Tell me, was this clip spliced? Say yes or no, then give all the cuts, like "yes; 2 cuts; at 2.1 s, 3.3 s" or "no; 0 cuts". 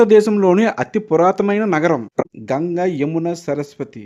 yes; 1 cut; at 2.2 s